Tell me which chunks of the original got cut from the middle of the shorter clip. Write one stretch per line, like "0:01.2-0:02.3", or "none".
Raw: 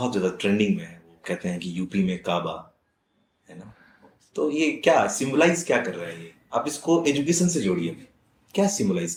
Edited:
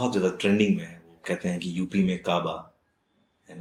none